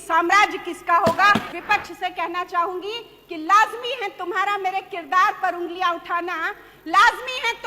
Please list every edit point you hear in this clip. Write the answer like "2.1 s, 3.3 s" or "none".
1.5 s